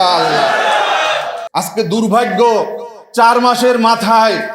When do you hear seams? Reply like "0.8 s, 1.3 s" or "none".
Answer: 1.4 s